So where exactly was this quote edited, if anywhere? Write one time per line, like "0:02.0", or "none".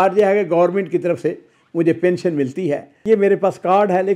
0:02.9